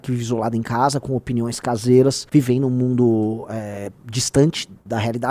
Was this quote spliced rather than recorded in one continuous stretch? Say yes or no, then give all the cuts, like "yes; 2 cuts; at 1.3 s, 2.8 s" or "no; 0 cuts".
yes; 1 cut; at 2.2 s